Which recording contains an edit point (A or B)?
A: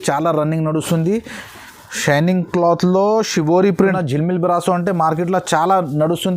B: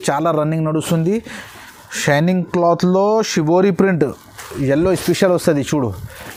A